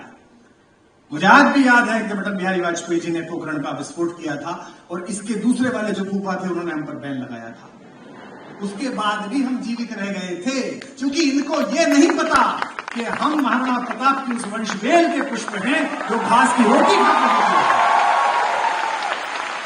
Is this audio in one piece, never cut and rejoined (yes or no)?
yes